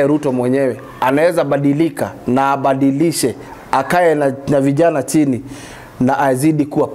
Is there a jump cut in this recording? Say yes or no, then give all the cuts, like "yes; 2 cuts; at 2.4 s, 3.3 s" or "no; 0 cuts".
no; 0 cuts